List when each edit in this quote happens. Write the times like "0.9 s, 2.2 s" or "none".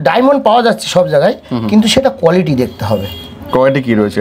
none